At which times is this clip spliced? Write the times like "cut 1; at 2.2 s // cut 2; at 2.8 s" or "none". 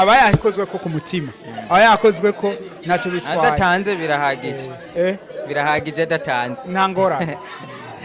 none